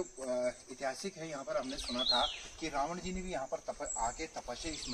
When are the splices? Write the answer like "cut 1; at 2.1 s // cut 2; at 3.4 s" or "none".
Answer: none

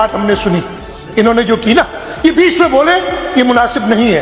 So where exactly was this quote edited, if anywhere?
none

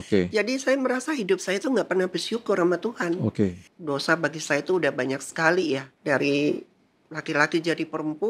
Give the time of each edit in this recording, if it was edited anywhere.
cut 1; at 3.7 s // cut 2; at 5.9 s

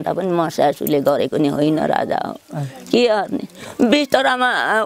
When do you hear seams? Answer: none

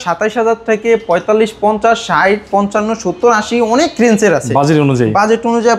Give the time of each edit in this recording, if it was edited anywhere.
none

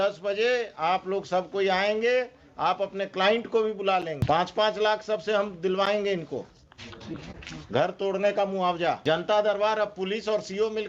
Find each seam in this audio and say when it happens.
cut 1; at 4.2 s // cut 2; at 9.0 s

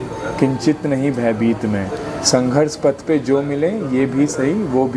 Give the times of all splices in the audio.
none

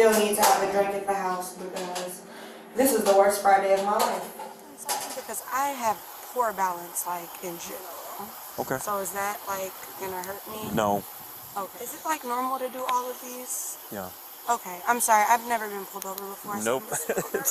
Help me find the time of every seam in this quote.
cut 1; at 5.1 s // cut 2; at 11.8 s

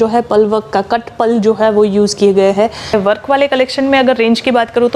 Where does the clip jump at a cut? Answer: cut 1; at 2.9 s

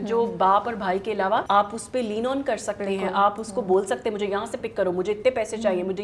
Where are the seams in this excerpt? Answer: cut 1; at 1.4 s

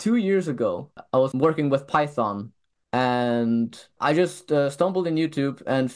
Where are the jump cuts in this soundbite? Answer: cut 1; at 1.0 s // cut 2; at 3.9 s

